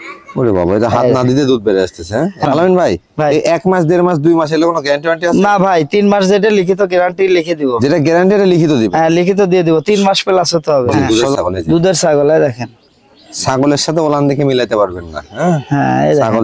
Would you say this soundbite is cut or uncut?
cut